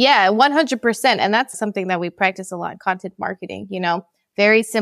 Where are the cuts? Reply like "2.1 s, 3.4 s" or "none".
1.5 s